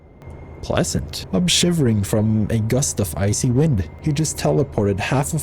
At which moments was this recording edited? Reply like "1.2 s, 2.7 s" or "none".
1.2 s, 3.9 s